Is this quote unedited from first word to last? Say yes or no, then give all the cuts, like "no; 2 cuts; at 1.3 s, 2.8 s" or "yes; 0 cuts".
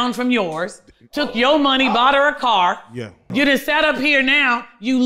no; 1 cut; at 3.3 s